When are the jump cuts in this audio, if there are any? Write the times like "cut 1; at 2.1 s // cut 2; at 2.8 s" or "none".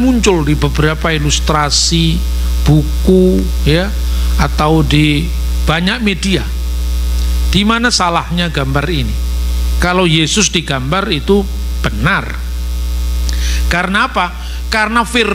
none